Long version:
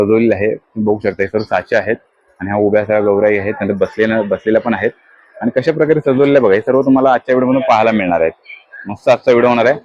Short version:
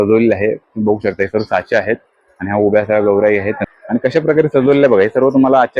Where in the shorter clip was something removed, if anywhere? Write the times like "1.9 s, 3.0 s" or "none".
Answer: 3.6 s